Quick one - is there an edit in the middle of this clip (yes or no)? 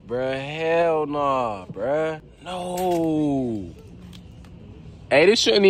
yes